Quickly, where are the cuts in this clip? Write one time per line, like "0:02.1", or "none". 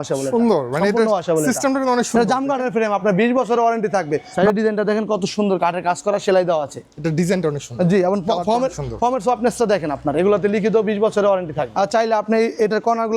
0:04.3
0:11.7